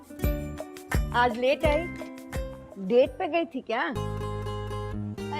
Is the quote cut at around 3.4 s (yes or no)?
no